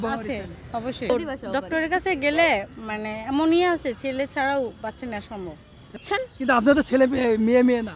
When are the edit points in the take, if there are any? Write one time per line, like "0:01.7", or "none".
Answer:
0:01.1
0:05.9